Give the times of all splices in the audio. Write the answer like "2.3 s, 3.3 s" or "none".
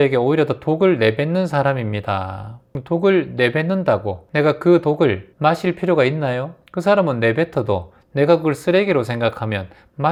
none